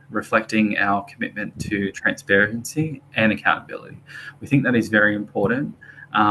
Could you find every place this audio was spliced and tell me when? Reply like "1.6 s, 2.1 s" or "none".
none